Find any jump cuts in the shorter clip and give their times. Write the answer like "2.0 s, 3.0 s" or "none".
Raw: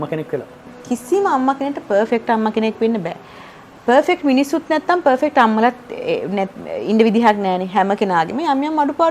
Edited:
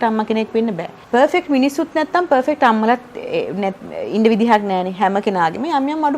0.9 s

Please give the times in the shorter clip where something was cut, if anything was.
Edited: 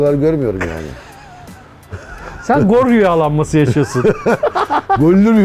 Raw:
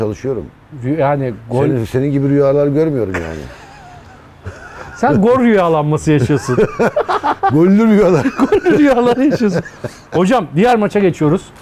none

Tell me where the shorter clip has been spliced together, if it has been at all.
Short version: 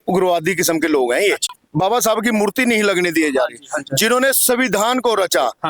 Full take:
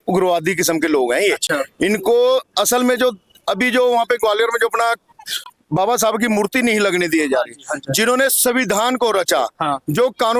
1.4 s

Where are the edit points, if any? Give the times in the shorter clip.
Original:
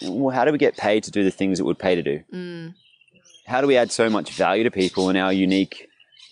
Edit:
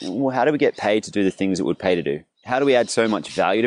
2.3 s

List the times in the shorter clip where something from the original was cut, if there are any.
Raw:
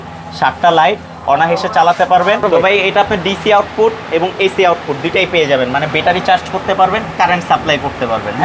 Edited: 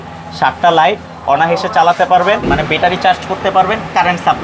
2.4 s

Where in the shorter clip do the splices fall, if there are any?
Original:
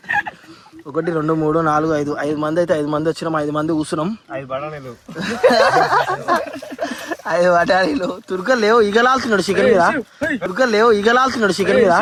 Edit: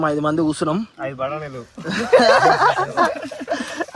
none

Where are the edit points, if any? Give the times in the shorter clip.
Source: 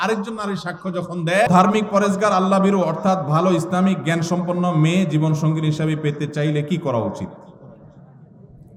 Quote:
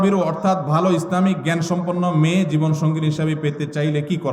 none

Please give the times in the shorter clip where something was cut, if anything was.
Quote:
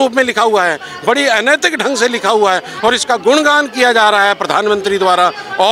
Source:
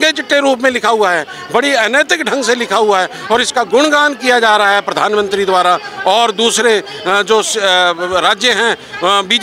none

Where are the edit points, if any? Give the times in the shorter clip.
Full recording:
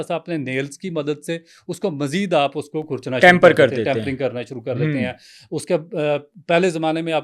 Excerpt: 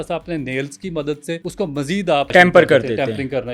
1.5 s, 2.3 s

